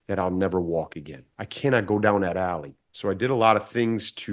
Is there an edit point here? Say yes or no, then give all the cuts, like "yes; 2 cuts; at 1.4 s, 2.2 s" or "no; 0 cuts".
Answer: no; 0 cuts